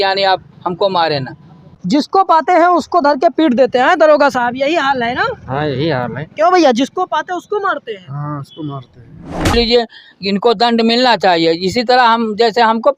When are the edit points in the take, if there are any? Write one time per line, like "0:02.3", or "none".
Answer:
0:01.7
0:09.5